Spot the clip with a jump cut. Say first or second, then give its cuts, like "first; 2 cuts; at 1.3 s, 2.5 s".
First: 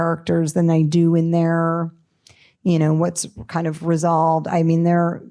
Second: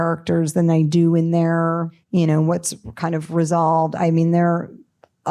second; 1 cut; at 2.0 s